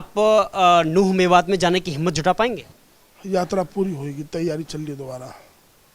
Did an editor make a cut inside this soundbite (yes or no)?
yes